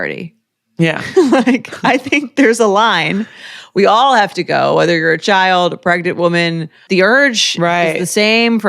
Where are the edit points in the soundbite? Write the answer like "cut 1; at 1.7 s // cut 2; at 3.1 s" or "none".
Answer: cut 1; at 6.7 s

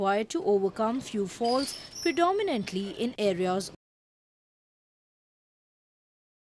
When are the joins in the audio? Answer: none

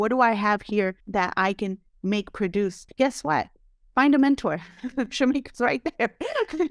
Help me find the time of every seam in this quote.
cut 1; at 1.0 s // cut 2; at 2.8 s

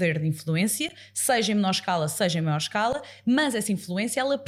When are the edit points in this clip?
none

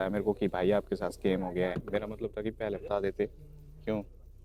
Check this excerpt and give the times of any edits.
none

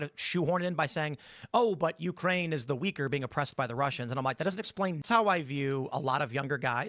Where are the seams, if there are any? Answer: cut 1; at 5.0 s

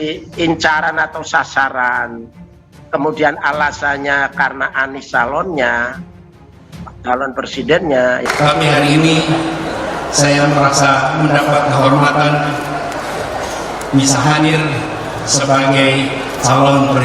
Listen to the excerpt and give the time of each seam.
cut 1; at 8.3 s

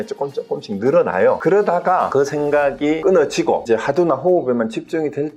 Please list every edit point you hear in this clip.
cut 1; at 1.4 s // cut 2; at 2.1 s // cut 3; at 3.0 s // cut 4; at 3.6 s

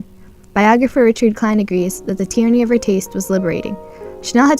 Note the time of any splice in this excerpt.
cut 1; at 2.4 s

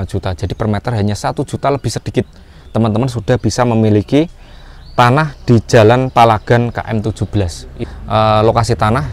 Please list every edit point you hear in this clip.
cut 1; at 7.7 s

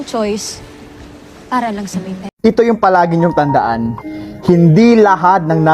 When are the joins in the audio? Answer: cut 1; at 2.3 s

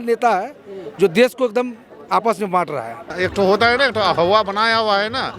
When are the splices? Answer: cut 1; at 3.1 s

